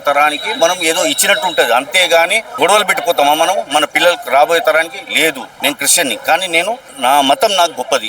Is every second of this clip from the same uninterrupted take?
no; 3 cuts; at 2.4 s, 5.5 s, 6.9 s

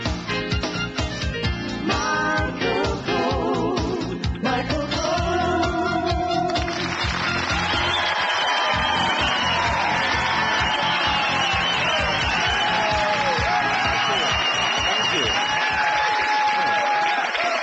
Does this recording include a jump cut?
no; 0 cuts

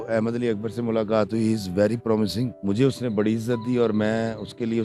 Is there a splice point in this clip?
yes; 1 cut; at 2.6 s

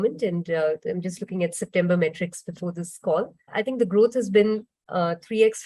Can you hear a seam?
yes; 1 cut; at 3.5 s

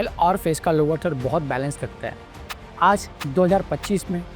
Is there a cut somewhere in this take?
yes; 1 cut; at 2.5 s

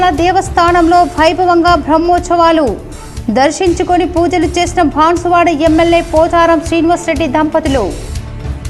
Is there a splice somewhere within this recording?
no; 0 cuts

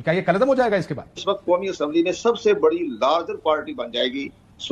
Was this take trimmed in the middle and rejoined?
yes; 1 cut; at 1.2 s

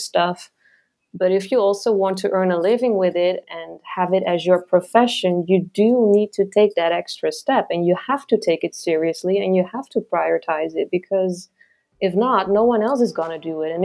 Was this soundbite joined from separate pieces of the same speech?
no; 0 cuts

